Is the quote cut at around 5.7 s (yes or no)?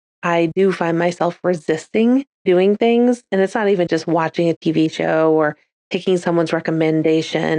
no